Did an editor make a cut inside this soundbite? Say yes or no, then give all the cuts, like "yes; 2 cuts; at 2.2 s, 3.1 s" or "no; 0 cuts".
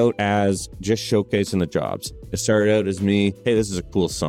yes; 1 cut; at 3.4 s